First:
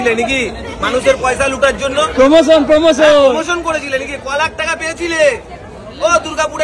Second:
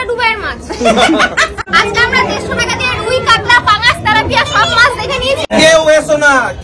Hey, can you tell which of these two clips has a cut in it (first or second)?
second